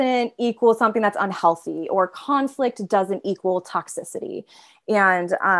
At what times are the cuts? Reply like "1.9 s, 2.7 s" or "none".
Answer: none